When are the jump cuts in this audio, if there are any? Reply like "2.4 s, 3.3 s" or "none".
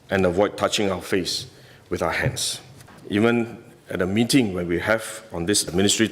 2.9 s